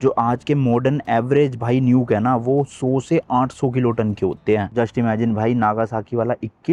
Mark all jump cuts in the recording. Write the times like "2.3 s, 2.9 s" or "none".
none